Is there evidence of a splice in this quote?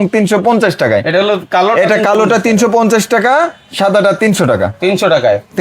no; 0 cuts

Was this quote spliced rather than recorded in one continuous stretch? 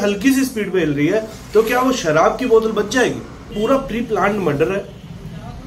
yes; 1 cut; at 3.5 s

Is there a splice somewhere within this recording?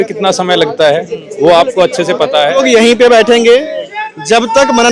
yes; 1 cut; at 2.6 s

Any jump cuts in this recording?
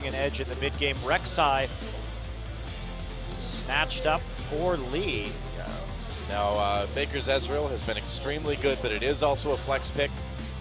no; 0 cuts

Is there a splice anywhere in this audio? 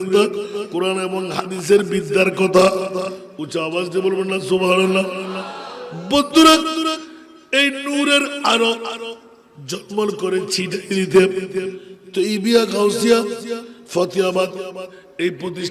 no; 0 cuts

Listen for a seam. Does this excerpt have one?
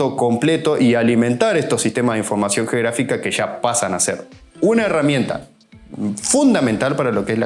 no; 0 cuts

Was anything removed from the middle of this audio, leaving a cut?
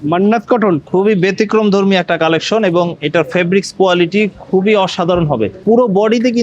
no; 0 cuts

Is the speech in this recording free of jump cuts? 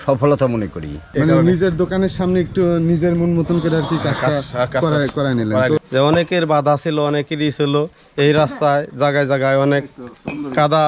no; 2 cuts; at 1.0 s, 5.8 s

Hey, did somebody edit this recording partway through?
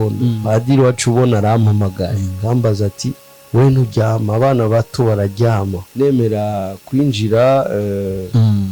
yes; 1 cut; at 5.8 s

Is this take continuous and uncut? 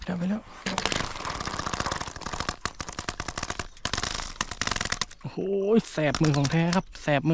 yes; 0 cuts

